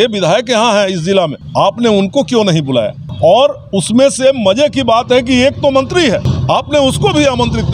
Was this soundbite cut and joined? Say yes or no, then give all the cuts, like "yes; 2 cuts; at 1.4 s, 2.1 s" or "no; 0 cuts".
yes; 3 cuts; at 1.4 s, 3.0 s, 6.3 s